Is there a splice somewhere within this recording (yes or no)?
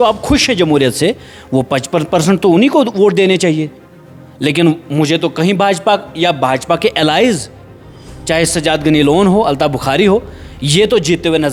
no